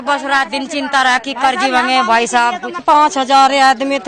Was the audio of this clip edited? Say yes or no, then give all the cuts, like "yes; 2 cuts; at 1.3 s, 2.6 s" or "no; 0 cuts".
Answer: yes; 1 cut; at 2.8 s